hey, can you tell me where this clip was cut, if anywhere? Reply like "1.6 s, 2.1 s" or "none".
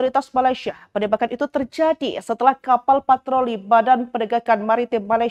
none